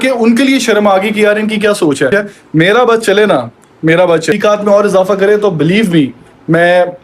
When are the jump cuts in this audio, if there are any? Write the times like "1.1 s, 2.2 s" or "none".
2.1 s, 4.4 s